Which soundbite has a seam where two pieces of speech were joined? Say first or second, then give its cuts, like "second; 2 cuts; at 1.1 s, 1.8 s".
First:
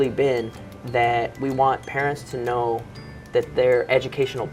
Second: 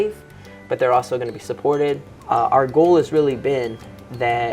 second; 1 cut; at 2.1 s